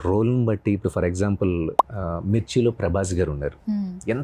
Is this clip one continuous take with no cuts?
yes; 0 cuts

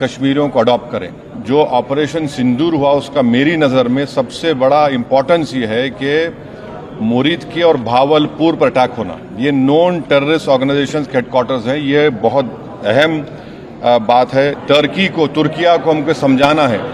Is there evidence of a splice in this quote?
yes; 2 cuts; at 1.3 s, 14.6 s

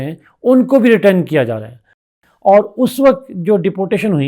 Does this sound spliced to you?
yes; 1 cut; at 2.0 s

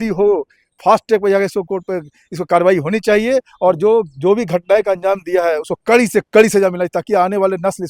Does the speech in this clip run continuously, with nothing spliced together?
yes; 0 cuts

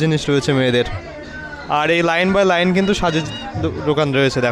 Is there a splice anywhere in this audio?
no; 0 cuts

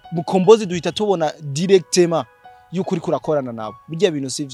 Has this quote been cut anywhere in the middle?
no; 0 cuts

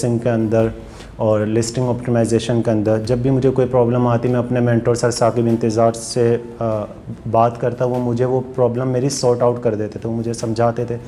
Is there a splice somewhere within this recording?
no; 0 cuts

